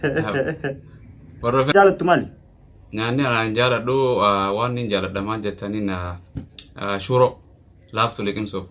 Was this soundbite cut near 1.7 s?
yes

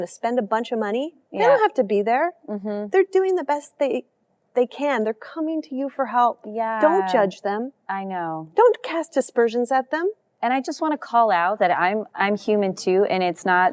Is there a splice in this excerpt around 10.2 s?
no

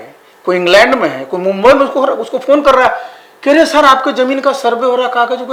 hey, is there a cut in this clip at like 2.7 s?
no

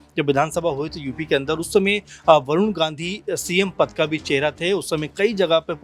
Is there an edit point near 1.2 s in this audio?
no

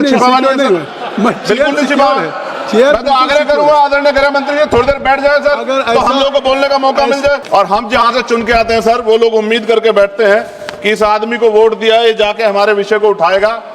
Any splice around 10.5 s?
no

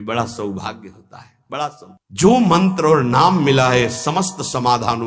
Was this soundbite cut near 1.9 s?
yes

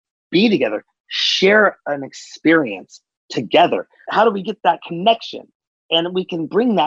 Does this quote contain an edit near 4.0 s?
yes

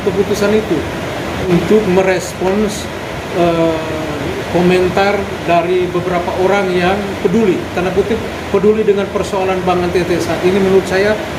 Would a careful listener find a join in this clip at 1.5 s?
yes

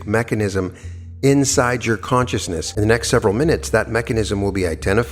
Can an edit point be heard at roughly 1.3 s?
no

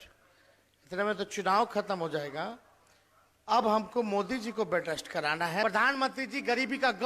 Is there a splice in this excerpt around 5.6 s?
yes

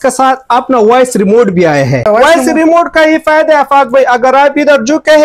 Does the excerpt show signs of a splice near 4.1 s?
no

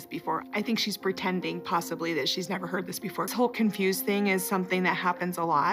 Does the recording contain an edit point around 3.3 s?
yes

